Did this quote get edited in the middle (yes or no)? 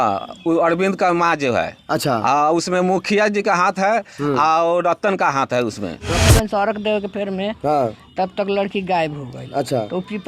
yes